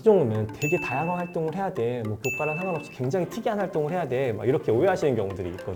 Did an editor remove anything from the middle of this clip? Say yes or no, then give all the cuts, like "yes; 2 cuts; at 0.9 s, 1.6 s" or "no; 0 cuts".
no; 0 cuts